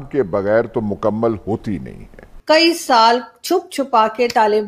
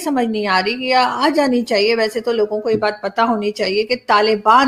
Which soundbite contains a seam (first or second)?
first